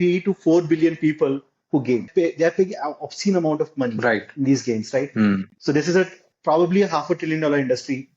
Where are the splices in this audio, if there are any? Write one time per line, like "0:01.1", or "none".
0:02.1